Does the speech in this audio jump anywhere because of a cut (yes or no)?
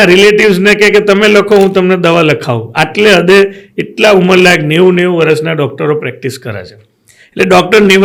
no